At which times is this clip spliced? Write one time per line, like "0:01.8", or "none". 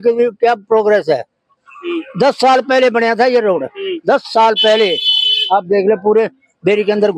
none